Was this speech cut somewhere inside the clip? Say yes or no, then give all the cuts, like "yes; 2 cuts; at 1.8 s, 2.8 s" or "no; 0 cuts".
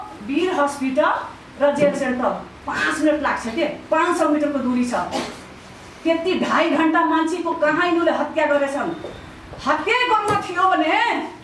no; 0 cuts